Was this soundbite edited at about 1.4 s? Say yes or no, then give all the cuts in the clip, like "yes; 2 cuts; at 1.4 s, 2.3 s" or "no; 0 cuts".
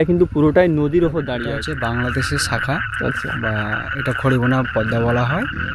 yes; 1 cut; at 1.4 s